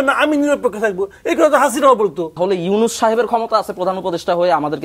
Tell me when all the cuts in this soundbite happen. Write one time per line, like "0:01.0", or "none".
0:02.4